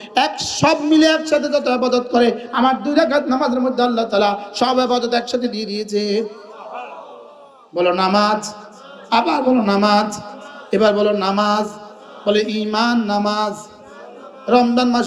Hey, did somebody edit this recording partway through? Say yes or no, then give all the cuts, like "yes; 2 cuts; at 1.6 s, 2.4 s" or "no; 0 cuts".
no; 0 cuts